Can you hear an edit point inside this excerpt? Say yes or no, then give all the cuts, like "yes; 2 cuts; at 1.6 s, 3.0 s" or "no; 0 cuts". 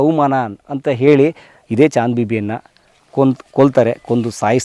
no; 0 cuts